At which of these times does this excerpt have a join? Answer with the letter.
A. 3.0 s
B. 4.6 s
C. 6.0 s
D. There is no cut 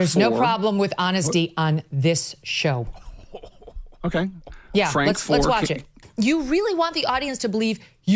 C